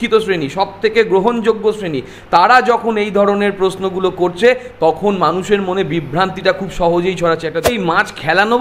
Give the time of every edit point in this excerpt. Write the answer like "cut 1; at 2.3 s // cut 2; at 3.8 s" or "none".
cut 1; at 7.7 s